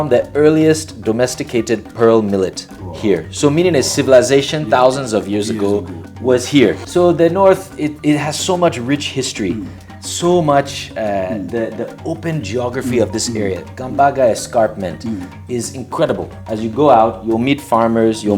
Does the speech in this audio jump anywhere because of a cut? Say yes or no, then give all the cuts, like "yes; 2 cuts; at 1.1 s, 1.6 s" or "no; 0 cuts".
yes; 2 cuts; at 6.8 s, 16.3 s